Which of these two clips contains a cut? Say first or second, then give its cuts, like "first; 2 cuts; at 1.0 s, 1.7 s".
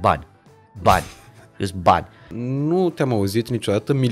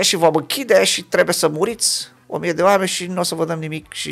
first; 1 cut; at 2.4 s